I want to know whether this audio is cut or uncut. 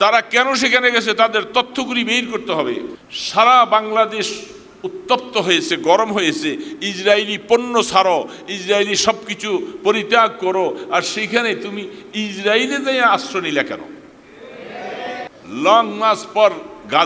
cut